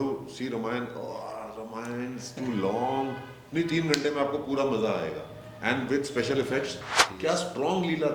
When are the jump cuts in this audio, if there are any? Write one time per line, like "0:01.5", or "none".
0:06.8